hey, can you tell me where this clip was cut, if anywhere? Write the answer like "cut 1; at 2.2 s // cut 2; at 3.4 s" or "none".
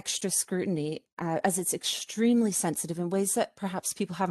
none